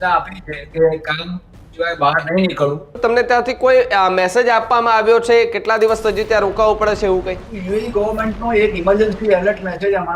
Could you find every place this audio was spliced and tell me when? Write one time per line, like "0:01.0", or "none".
0:03.0
0:07.5